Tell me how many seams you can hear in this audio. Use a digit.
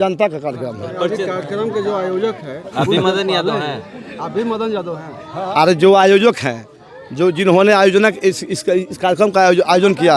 1